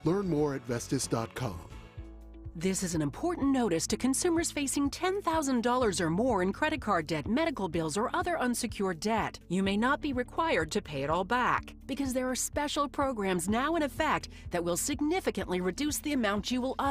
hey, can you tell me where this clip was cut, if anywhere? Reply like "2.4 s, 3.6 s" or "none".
2.0 s